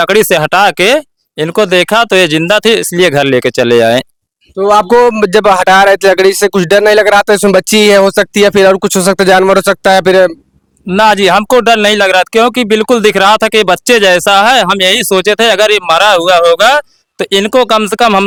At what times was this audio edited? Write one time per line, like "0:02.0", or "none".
none